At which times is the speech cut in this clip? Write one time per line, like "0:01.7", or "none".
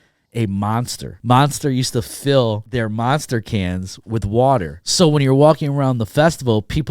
0:01.1
0:02.6
0:04.8